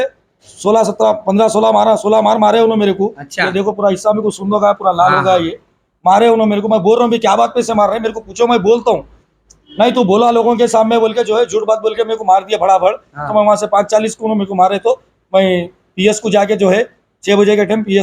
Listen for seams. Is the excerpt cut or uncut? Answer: uncut